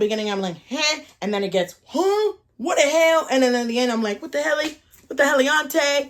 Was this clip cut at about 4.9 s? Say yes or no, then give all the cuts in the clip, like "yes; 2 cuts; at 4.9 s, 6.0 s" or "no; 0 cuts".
no; 0 cuts